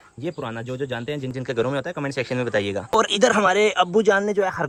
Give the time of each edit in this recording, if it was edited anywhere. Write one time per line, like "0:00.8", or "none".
none

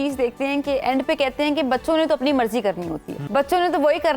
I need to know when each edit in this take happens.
0:03.2

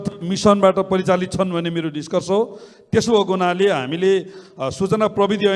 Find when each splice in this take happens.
none

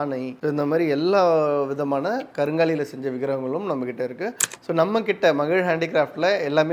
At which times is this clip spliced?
0:04.4

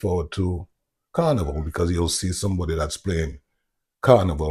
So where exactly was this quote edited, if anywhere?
none

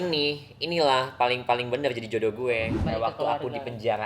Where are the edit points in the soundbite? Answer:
0:02.8

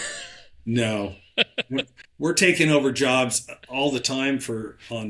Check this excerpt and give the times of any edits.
none

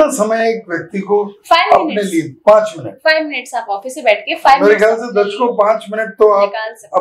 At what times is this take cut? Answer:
none

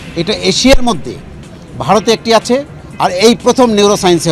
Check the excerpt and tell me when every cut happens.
none

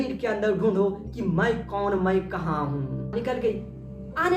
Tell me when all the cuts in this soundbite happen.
0:03.1

